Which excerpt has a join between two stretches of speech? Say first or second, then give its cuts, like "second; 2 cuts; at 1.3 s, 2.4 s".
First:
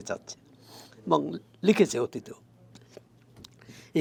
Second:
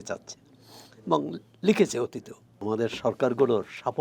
second; 1 cut; at 2.6 s